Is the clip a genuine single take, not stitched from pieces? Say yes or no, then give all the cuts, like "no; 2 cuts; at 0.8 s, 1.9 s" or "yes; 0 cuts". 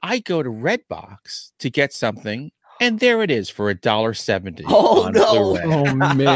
yes; 0 cuts